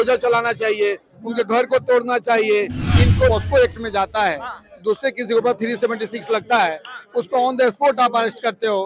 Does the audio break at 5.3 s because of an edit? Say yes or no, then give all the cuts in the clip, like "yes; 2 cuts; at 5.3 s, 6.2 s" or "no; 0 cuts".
no; 1 cut; at 3.3 s